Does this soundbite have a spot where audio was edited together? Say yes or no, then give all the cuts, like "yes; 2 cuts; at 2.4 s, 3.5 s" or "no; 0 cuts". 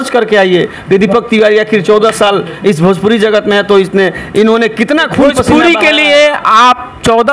yes; 1 cut; at 5.4 s